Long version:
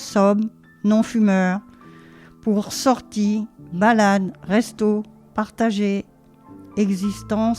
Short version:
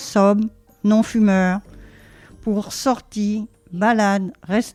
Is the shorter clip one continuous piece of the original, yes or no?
yes